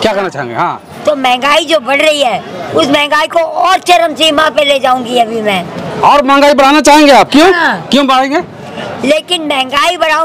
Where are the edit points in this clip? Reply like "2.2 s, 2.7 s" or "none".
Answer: none

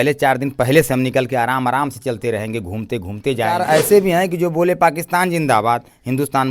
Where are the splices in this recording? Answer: 3.5 s

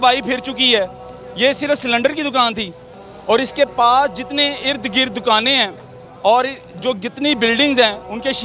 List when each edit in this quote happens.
none

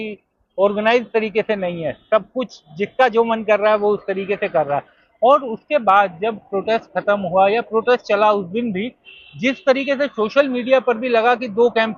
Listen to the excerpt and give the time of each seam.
none

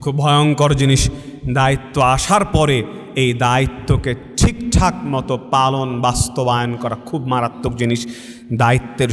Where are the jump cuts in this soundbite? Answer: none

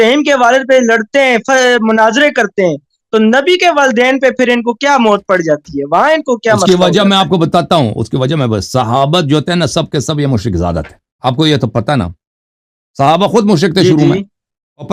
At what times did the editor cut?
none

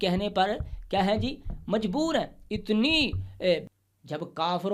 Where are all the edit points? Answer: 3.6 s

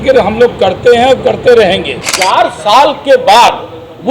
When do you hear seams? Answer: 2.0 s

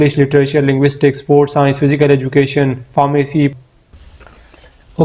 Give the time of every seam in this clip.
3.5 s

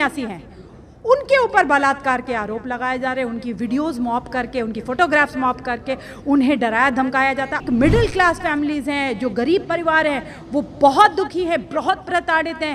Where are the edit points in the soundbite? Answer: 7.6 s

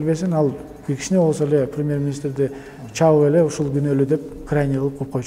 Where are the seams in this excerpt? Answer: none

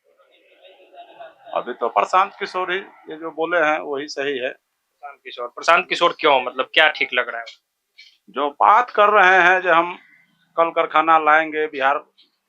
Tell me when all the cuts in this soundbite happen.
none

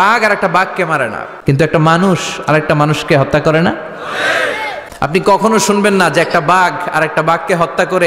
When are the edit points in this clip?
1.2 s, 4.8 s

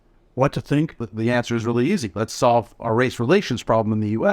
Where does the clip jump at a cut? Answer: 1.0 s

